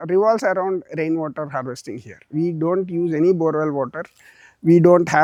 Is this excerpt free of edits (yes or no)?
yes